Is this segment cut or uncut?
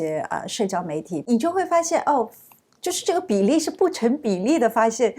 cut